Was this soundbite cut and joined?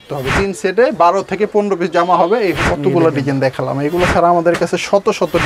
yes; 1 cut; at 2.6 s

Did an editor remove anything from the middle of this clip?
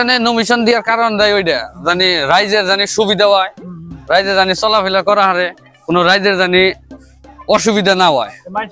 no; 0 cuts

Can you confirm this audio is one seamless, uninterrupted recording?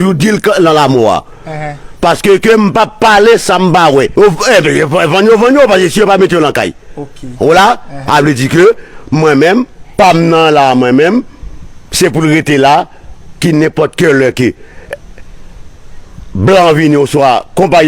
no; 1 cut; at 4.1 s

